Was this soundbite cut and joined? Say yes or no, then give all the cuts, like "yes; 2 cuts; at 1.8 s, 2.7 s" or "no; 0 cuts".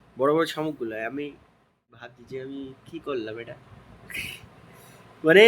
yes; 1 cut; at 2.1 s